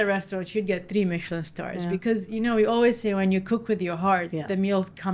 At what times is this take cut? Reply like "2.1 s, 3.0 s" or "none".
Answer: none

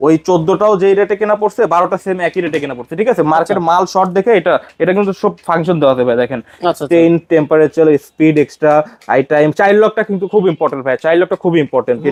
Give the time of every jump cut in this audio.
none

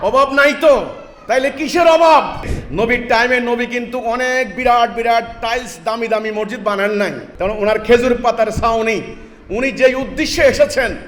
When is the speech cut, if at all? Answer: 2.6 s, 7.2 s

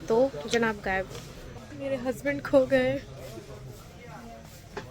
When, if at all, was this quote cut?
1.2 s

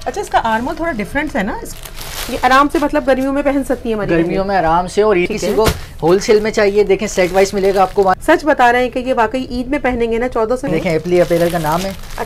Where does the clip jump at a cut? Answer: 1.7 s, 5.3 s, 8.2 s, 10.6 s

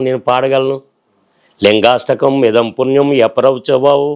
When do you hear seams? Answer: none

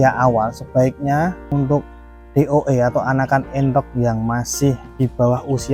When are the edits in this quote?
1.4 s, 4.9 s

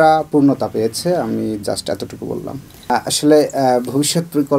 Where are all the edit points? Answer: 2.9 s

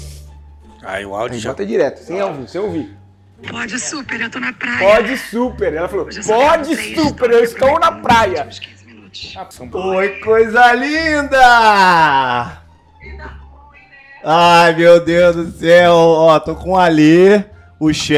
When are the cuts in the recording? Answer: none

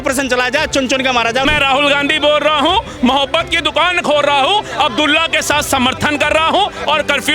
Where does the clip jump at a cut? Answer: 1.5 s

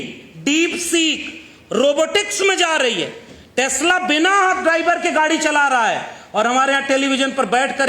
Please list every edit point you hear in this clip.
none

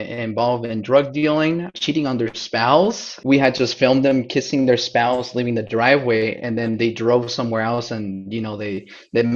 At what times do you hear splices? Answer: 1.8 s, 3.1 s

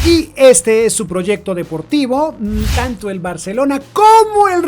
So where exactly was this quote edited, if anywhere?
2.5 s

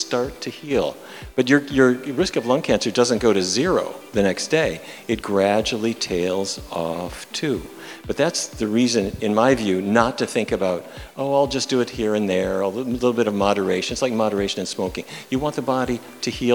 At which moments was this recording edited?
none

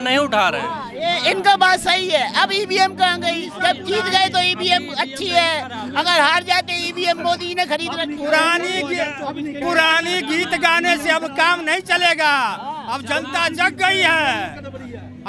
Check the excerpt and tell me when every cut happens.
none

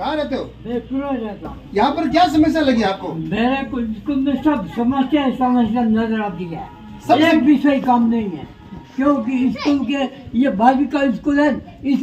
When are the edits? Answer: 1.5 s

